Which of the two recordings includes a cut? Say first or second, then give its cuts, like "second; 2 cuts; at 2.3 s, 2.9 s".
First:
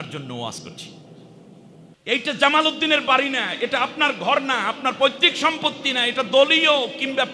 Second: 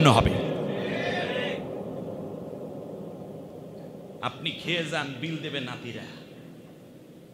first; 1 cut; at 2.0 s